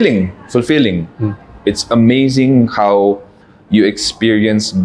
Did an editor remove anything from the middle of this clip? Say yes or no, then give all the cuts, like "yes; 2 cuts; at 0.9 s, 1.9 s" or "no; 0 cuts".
no; 0 cuts